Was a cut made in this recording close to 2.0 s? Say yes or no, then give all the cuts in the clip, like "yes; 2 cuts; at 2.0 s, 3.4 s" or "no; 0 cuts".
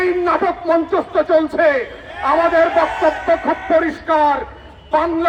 no; 0 cuts